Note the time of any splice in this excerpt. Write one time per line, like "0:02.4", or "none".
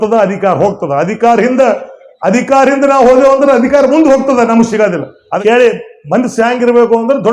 0:05.4